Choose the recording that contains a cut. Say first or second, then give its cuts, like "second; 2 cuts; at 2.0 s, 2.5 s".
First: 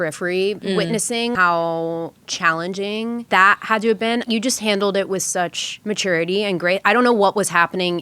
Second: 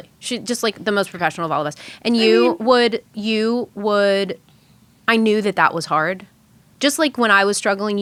first; 4 cuts; at 1.1 s, 3.3 s, 4.2 s, 5.7 s